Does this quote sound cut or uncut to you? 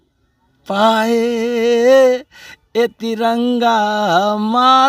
uncut